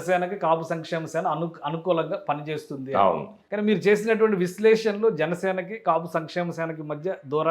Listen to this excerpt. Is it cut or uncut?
cut